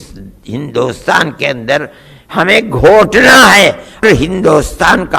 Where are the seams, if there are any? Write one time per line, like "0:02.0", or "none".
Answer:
0:04.0